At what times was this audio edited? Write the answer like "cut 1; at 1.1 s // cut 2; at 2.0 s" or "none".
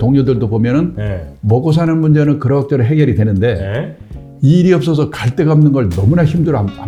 none